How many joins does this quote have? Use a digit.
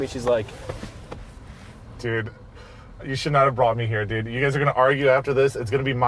0